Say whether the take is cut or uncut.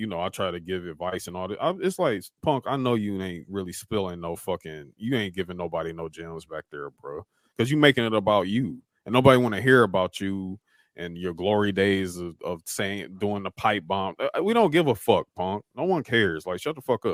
uncut